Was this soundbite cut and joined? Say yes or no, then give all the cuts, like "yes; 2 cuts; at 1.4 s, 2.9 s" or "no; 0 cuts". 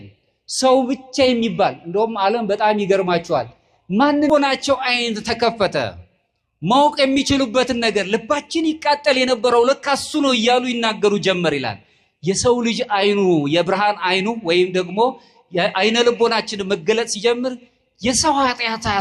yes; 1 cut; at 4.3 s